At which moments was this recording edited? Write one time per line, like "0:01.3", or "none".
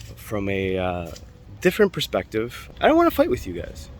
0:02.6